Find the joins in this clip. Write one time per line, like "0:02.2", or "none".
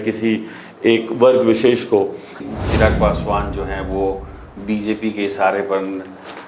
0:02.4

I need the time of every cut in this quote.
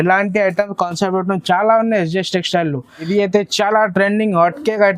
0:03.1

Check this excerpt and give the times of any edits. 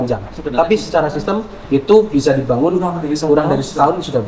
none

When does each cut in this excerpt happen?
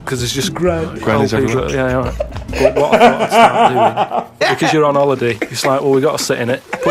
0:04.4

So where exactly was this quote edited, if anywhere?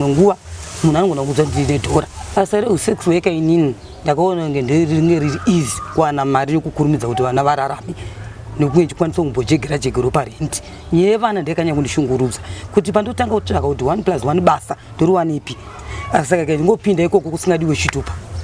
0:02.2

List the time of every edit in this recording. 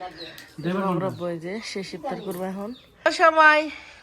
0:03.1

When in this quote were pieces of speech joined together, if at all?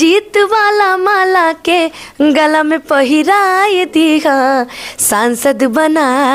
none

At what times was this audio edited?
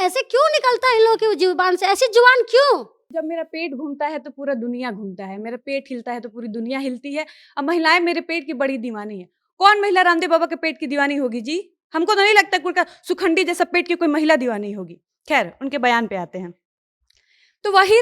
0:03.0

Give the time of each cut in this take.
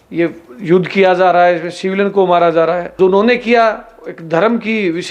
0:02.9

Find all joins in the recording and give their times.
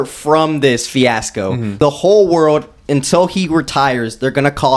0:01.7

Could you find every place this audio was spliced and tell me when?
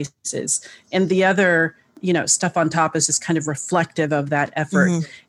0:02.0

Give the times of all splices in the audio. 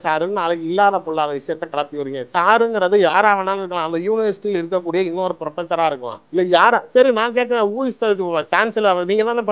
0:06.1

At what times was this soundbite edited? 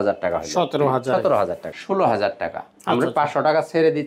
0:01.7

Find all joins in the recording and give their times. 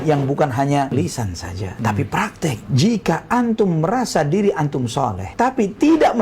0:00.9
0:02.6

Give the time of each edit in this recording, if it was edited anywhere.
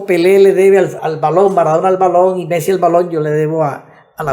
0:01.0

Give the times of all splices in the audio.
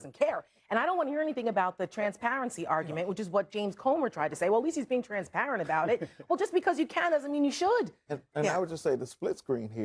none

